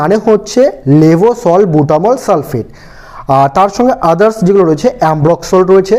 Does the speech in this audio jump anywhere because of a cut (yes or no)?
no